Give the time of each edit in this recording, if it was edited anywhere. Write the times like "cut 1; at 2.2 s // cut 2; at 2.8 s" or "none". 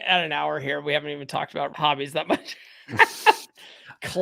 cut 1; at 1.7 s